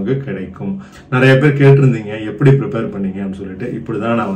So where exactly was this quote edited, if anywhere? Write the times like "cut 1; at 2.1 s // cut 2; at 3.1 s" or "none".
cut 1; at 0.9 s